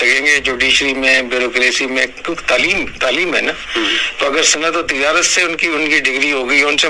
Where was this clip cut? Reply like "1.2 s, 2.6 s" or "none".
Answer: none